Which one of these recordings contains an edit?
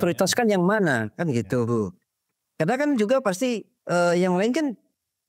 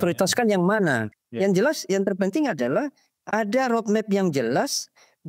second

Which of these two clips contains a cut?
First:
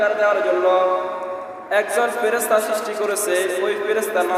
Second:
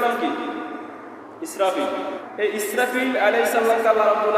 second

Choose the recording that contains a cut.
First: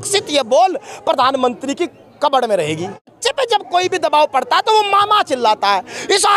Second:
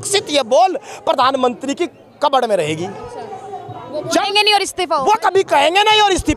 first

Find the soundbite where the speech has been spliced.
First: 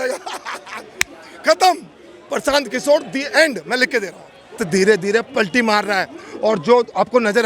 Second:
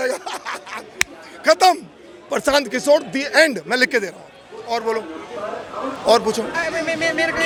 first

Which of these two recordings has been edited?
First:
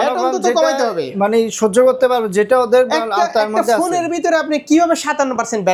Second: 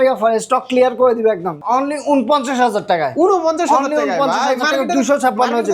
second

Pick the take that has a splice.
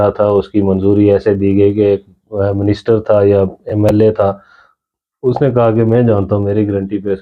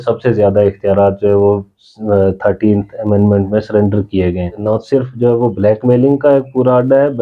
second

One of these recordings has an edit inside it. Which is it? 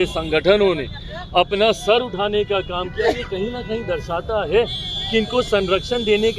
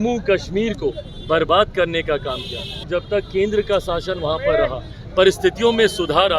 second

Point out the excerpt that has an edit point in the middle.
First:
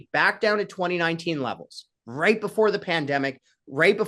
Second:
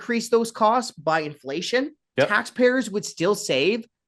second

